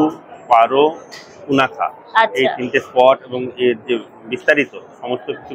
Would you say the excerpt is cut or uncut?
uncut